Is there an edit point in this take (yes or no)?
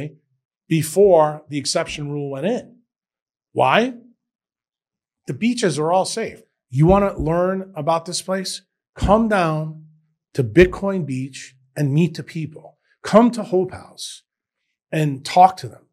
yes